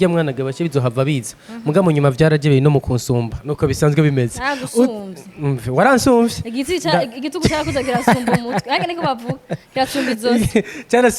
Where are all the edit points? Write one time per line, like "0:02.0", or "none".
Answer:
none

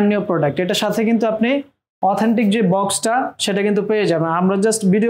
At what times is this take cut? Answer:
none

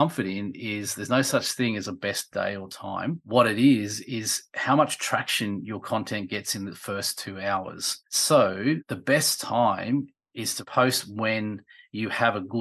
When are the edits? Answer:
none

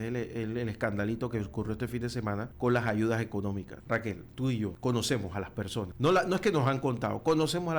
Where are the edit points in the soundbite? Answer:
0:02.5
0:03.7
0:04.8
0:05.9

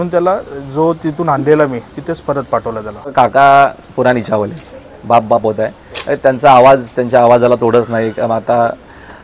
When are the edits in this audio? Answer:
0:03.1

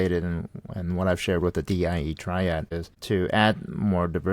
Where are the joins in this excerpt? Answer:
0:02.7

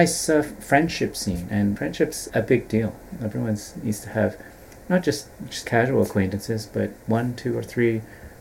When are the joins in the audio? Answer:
0:01.9
0:07.0

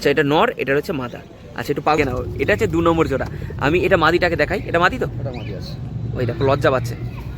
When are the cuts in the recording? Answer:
0:02.0

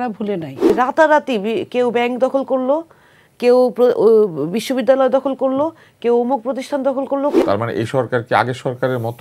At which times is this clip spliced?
0:00.7
0:07.4

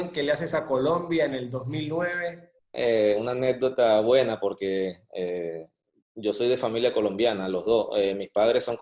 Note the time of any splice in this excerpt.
0:02.6

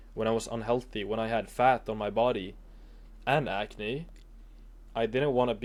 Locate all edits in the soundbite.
none

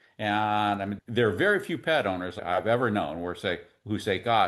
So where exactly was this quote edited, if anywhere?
0:01.0
0:02.4

